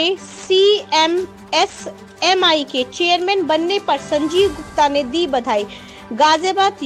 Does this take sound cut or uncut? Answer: uncut